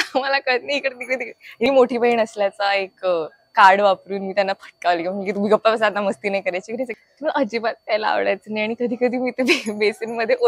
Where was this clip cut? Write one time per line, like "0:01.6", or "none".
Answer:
0:01.6
0:06.9